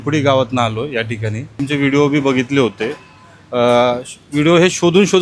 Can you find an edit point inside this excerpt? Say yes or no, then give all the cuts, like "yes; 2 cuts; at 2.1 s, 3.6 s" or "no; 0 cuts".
yes; 1 cut; at 1.6 s